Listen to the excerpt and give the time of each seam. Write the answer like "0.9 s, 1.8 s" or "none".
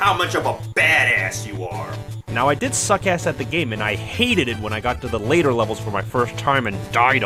none